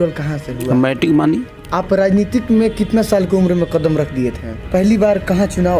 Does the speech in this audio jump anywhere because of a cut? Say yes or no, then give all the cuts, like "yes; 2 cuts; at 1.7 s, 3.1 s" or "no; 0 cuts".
yes; 2 cuts; at 1.6 s, 4.5 s